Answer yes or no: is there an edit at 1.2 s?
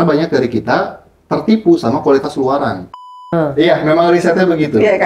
no